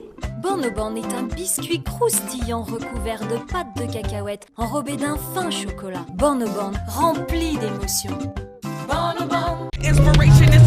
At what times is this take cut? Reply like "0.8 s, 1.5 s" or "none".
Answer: 9.7 s